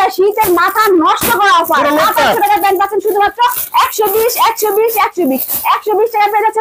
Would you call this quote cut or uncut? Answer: uncut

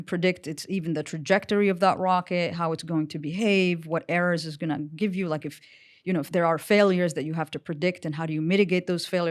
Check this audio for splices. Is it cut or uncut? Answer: uncut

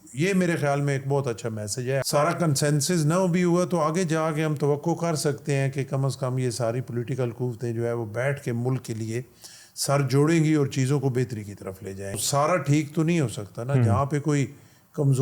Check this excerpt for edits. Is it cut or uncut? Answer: cut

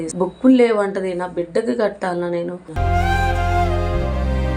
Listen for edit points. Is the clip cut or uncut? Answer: cut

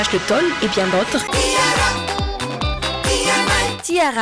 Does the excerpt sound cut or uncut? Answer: cut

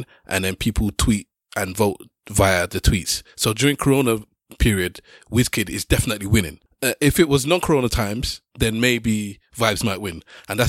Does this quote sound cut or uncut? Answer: cut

